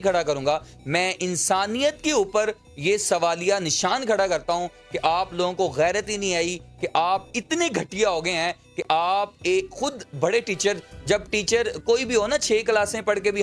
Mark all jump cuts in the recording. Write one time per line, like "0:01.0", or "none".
none